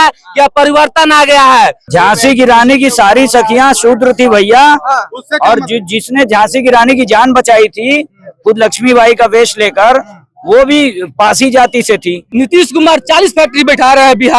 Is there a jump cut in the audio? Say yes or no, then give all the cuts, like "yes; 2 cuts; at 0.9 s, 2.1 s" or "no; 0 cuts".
yes; 2 cuts; at 1.8 s, 12.3 s